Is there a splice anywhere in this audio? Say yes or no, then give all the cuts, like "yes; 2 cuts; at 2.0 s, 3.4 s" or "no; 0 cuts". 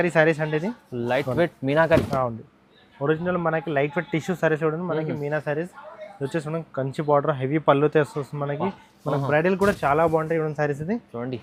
no; 0 cuts